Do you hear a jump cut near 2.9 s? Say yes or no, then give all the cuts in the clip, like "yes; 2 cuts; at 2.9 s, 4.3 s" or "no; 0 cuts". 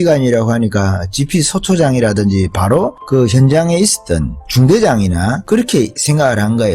no; 2 cuts; at 4.5 s, 5.7 s